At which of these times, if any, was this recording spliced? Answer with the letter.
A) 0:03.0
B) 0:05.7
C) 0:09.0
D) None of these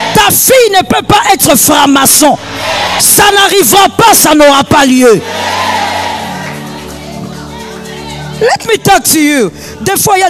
D